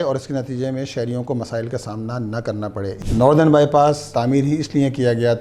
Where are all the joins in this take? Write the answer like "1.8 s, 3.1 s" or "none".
3.0 s, 4.1 s